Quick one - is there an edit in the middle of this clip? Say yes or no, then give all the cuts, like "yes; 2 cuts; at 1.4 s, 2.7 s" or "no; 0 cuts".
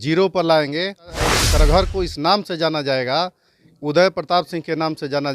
yes; 1 cut; at 1.2 s